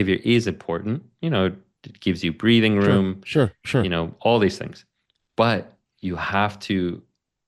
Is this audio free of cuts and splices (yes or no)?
yes